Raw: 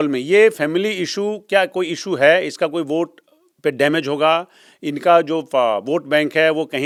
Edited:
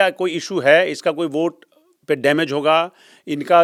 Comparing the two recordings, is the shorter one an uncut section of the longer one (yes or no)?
yes